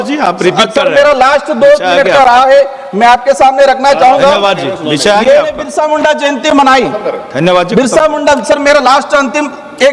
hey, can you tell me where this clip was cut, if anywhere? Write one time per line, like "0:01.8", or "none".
0:05.6